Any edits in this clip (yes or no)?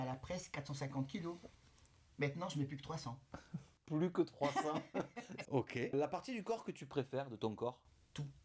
no